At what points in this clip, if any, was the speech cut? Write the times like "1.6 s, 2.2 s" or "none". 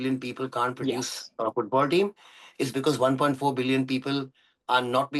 none